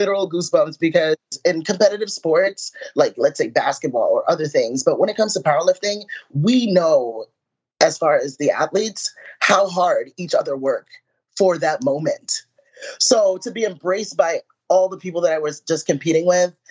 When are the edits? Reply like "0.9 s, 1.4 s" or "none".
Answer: 1.3 s